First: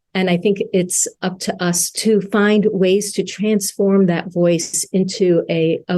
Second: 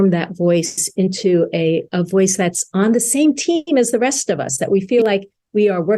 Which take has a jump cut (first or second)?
first